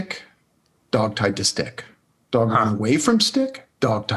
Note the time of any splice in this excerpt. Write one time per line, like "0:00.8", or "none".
none